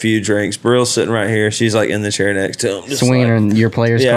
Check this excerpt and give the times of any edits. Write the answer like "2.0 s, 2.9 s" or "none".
none